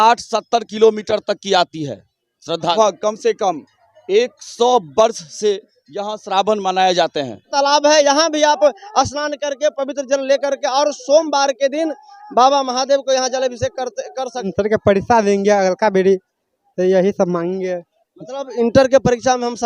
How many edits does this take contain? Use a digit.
3